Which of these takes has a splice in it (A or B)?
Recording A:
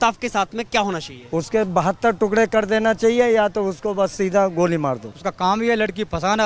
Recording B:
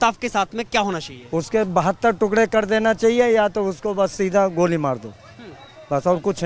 A